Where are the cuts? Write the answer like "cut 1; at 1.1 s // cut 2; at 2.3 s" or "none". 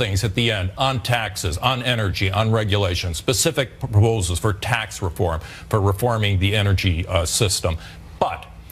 cut 1; at 1.5 s

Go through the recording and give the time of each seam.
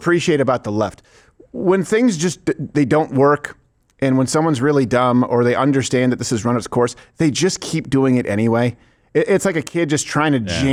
none

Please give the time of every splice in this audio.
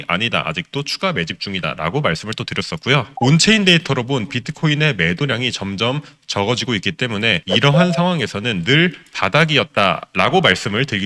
none

